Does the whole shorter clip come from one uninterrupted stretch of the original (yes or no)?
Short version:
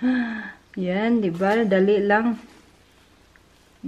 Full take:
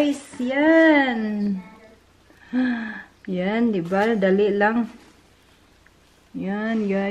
yes